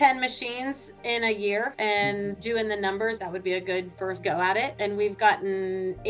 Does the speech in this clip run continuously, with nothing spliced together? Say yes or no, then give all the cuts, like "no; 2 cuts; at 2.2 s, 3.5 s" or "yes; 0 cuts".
yes; 0 cuts